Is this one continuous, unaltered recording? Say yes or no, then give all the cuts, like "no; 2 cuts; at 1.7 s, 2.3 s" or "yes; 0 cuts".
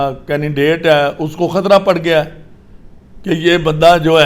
yes; 0 cuts